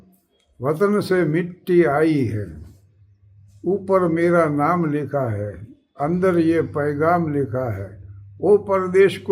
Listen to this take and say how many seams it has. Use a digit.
0